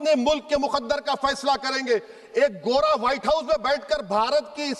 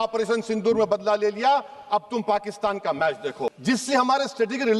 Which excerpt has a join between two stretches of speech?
second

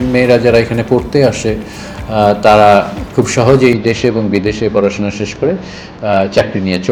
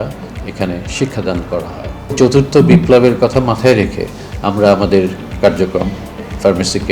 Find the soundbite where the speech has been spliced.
second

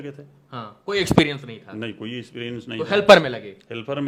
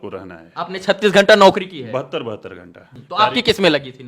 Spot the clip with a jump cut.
second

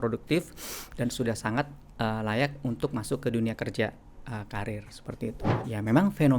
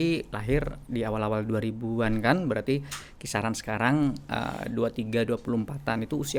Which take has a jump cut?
first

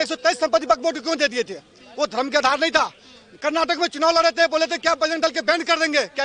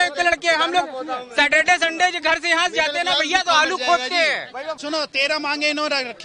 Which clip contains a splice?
second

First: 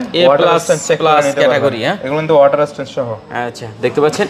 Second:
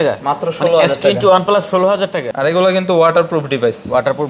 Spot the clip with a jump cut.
second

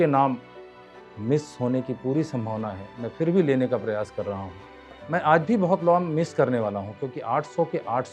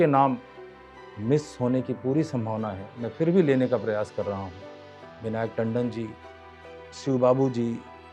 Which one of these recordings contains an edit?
first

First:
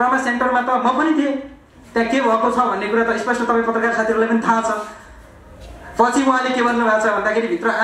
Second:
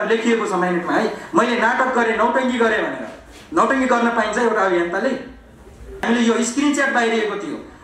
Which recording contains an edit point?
second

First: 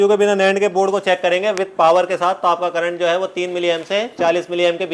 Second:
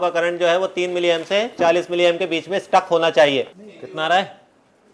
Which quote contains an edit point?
second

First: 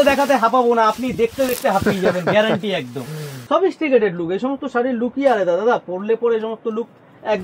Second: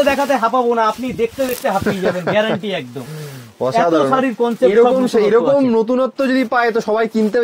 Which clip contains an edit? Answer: first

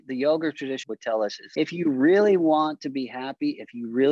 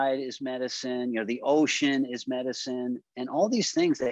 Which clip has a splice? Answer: first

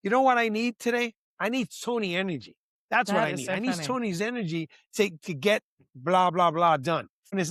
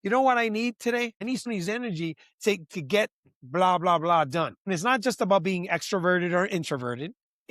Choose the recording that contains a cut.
second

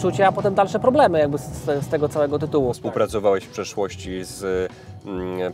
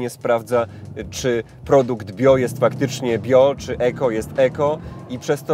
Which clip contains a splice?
first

